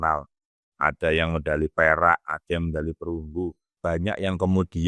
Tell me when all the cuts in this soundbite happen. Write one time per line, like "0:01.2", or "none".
0:03.7